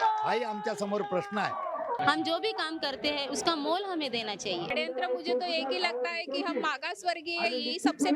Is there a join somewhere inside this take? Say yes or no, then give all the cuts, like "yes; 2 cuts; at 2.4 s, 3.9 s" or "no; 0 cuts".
yes; 2 cuts; at 2.0 s, 4.7 s